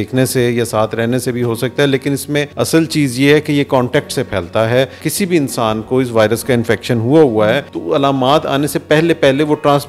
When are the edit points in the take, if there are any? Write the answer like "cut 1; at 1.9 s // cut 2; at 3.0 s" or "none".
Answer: cut 1; at 2.5 s // cut 2; at 5.0 s // cut 3; at 7.7 s